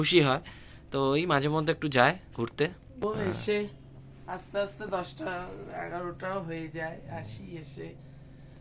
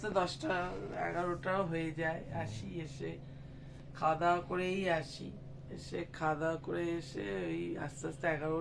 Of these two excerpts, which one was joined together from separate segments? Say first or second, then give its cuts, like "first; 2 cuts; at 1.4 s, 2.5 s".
first; 1 cut; at 2.9 s